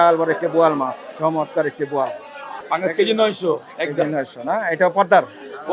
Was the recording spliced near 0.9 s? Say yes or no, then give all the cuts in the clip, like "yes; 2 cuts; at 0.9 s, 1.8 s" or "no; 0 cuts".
no; 1 cut; at 2.5 s